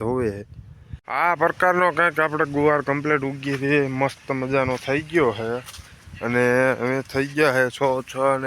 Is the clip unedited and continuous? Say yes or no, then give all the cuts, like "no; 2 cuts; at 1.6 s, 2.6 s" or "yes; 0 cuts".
no; 1 cut; at 1.0 s